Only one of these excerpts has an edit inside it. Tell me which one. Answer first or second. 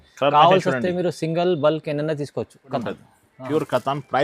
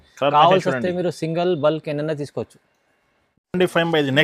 first